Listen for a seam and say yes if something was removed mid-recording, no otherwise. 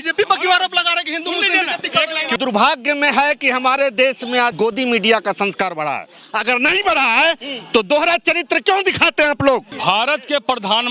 yes